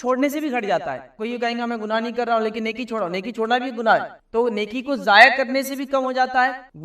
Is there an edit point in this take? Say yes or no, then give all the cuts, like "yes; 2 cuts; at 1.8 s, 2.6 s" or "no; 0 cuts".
no; 0 cuts